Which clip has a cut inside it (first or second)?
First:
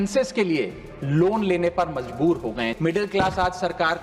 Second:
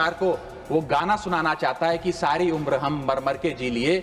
first